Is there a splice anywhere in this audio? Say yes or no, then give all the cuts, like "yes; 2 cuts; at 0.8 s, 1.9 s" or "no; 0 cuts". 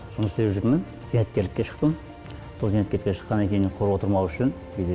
yes; 1 cut; at 1.0 s